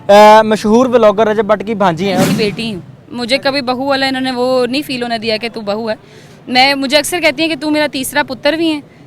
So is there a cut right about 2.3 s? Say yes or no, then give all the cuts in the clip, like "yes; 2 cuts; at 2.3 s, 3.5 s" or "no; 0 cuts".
yes; 1 cut; at 2.3 s